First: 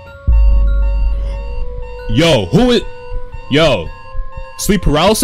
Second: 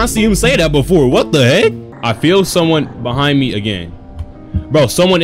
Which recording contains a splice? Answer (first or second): second